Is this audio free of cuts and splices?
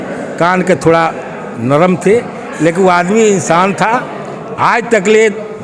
yes; 0 cuts

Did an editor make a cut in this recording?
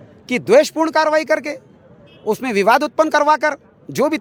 no; 0 cuts

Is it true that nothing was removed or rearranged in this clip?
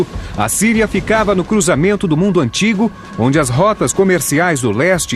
no; 1 cut; at 2.5 s

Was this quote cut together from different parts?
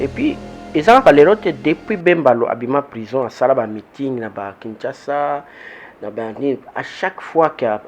no; 0 cuts

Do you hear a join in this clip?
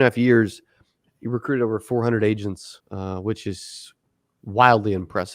yes; 1 cut; at 2.7 s

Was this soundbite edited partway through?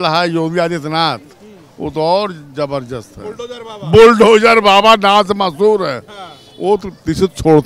no; 0 cuts

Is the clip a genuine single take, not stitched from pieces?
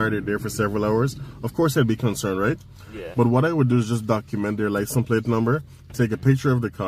yes; 0 cuts

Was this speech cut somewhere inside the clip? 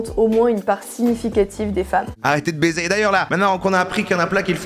yes; 1 cut; at 2.1 s

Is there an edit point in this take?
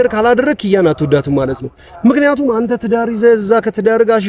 no; 0 cuts

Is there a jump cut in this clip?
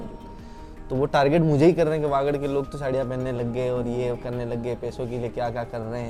no; 0 cuts

